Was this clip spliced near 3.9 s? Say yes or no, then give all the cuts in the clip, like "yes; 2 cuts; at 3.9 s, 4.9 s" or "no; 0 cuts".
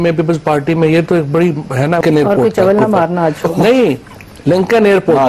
no; 1 cut; at 2.0 s